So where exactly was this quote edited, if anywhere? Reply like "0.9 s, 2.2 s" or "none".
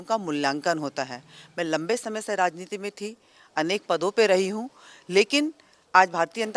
none